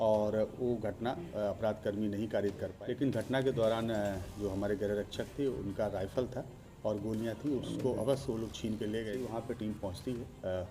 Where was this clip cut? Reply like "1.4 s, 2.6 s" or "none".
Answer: 2.7 s, 9.2 s